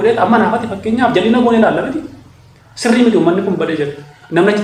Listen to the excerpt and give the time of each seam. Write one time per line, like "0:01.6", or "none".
none